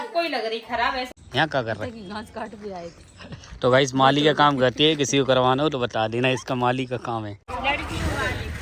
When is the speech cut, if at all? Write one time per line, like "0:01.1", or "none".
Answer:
0:01.1
0:07.5